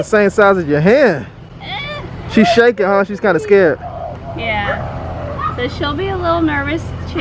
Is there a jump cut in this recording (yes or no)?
no